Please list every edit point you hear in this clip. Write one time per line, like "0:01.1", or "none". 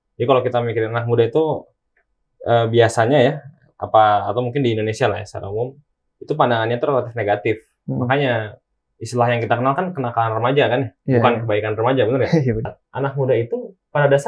0:12.8